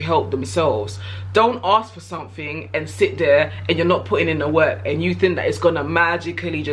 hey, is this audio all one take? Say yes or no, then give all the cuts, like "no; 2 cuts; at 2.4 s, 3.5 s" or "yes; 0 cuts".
yes; 0 cuts